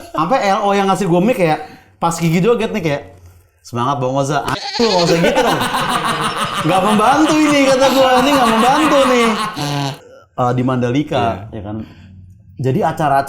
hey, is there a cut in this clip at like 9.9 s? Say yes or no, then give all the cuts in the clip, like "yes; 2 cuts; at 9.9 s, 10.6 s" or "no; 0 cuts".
yes; 1 cut; at 9.9 s